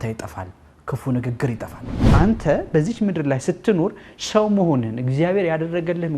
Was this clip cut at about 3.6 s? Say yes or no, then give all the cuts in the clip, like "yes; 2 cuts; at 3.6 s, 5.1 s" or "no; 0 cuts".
no; 1 cut; at 2.0 s